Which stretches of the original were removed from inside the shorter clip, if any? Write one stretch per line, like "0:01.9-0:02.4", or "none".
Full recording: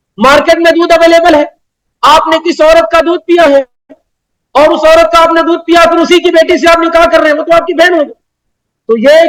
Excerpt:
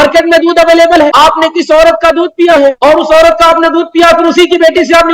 0:01.5-0:02.0
0:03.7-0:04.5